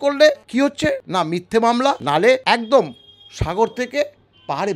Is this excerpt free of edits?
no; 2 cuts; at 0.9 s, 2.2 s

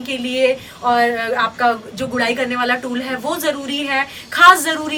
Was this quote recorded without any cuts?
yes; 0 cuts

